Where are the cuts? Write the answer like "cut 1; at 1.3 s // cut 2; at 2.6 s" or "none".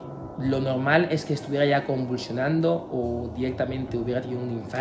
none